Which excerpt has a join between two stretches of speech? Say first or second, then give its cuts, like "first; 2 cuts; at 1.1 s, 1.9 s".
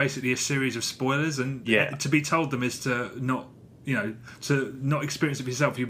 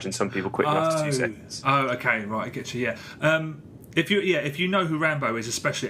first; 1 cut; at 4.7 s